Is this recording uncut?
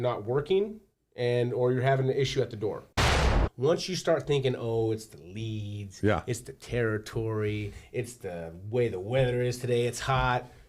no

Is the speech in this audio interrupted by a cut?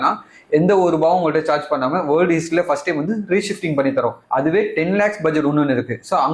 yes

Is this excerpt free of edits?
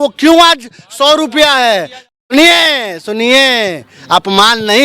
no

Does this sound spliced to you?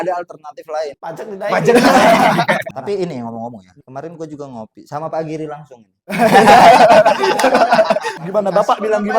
yes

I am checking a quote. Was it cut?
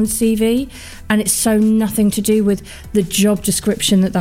no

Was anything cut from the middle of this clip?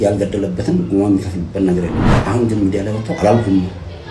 yes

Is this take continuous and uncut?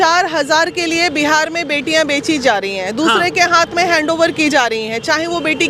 yes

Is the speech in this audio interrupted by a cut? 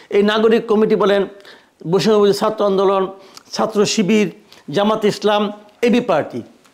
no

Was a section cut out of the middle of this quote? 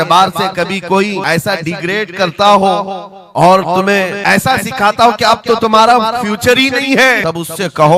yes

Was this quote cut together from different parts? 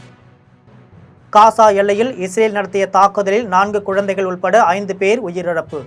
yes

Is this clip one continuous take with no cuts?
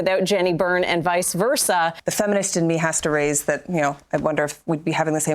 no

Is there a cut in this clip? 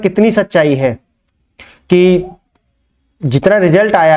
no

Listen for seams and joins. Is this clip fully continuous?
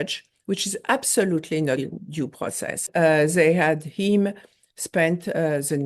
no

